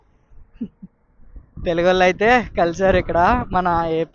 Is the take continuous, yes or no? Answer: yes